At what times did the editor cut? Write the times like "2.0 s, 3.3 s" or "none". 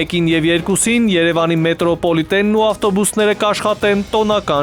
none